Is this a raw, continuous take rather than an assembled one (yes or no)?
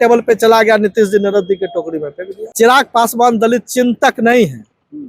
no